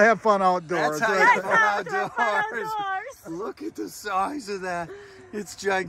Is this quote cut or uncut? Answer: uncut